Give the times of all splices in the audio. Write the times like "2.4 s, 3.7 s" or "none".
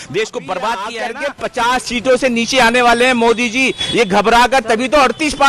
1.2 s